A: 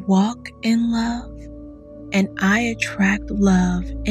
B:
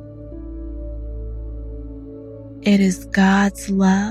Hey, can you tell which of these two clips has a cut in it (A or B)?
B